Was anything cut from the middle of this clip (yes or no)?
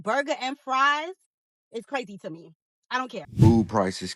yes